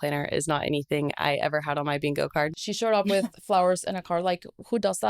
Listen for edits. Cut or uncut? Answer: cut